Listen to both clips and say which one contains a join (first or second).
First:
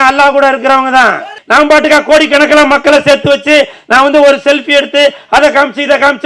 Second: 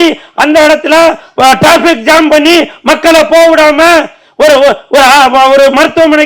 first